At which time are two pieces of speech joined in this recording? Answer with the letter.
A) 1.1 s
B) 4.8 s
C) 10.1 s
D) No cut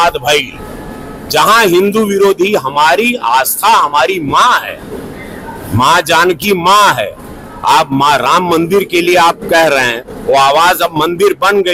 D